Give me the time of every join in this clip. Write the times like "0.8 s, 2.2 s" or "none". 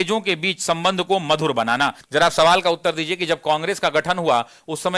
2.0 s